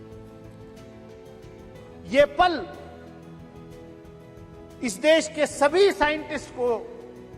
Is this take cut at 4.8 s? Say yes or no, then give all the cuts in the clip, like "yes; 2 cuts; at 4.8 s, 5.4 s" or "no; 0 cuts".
yes; 2 cuts; at 2.8 s, 4.8 s